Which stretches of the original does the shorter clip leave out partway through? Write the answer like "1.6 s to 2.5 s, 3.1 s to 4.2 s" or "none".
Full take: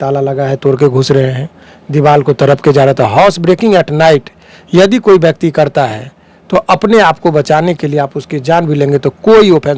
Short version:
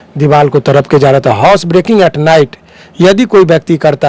none

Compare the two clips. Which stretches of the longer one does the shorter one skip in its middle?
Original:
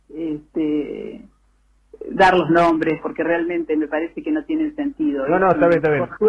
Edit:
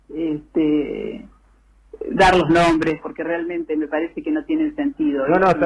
none

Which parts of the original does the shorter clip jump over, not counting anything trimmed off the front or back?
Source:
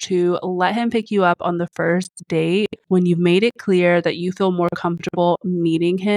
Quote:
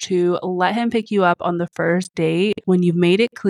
2.4 s to 2.6 s

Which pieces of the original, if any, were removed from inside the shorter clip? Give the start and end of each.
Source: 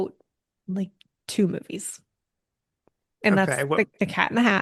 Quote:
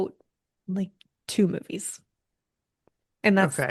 none

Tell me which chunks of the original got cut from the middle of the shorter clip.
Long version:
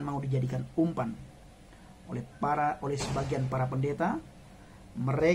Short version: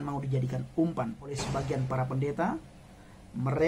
1.3 s to 2.9 s

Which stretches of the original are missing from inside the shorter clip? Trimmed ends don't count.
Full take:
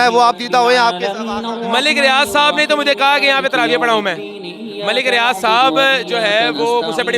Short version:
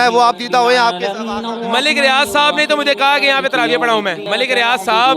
4.2 s to 4.8 s

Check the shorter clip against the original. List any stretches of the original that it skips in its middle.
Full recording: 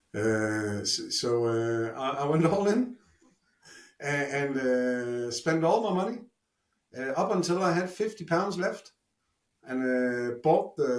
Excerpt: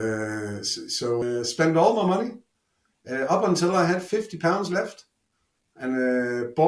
1.4 s to 5.1 s

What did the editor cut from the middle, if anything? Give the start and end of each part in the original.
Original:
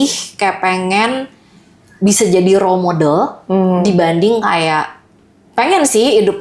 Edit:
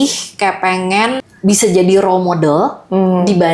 1.3 s to 1.9 s

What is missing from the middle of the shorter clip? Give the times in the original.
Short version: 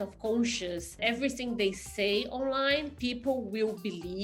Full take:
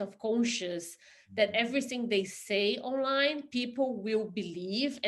1.0 s to 1.5 s

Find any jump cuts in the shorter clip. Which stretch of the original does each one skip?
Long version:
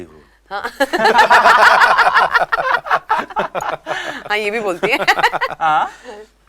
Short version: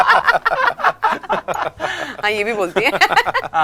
none

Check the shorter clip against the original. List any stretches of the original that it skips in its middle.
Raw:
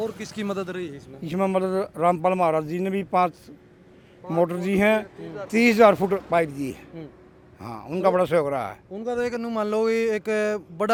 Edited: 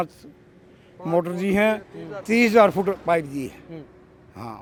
none

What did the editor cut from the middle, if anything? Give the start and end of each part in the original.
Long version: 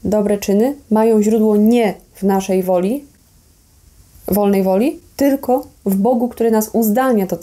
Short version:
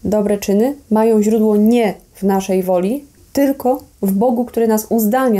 3.2 s to 5.1 s

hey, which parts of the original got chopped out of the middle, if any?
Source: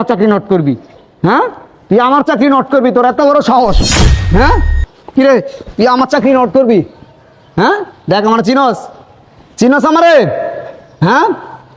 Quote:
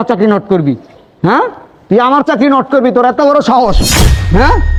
none

